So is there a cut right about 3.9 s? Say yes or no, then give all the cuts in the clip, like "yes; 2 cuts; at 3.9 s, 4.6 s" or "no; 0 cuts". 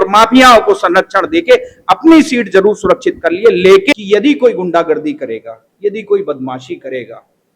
yes; 1 cut; at 3.9 s